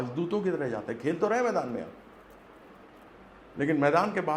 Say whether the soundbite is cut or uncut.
uncut